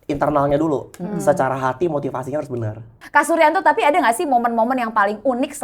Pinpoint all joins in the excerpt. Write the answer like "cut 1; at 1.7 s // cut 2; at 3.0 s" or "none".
cut 1; at 2.9 s